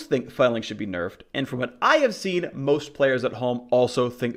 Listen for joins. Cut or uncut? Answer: uncut